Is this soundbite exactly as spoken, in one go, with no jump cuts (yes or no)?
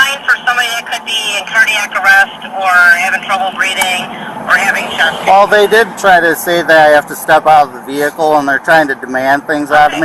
yes